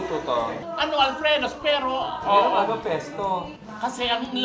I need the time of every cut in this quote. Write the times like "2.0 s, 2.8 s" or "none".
none